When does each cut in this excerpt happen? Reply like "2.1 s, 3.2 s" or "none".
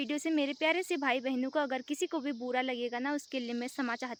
none